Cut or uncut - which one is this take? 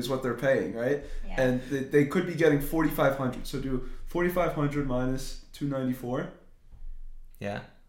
uncut